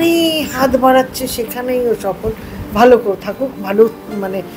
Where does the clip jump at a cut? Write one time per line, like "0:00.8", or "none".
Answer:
none